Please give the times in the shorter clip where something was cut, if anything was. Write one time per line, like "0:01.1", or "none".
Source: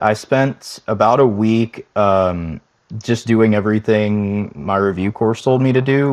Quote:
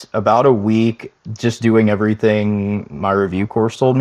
0:01.1